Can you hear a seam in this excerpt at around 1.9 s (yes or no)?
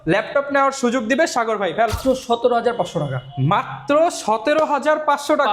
yes